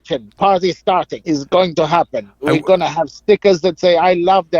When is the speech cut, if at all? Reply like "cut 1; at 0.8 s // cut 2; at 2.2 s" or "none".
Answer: cut 1; at 1.1 s